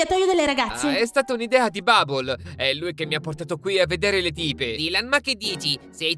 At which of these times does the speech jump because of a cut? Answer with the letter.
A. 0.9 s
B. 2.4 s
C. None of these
A